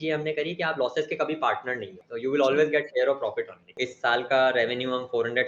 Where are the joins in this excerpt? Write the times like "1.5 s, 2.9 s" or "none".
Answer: 2.0 s, 3.9 s